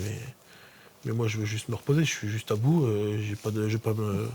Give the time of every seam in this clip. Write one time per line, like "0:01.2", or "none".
none